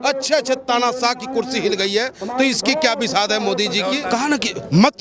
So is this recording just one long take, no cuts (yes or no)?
no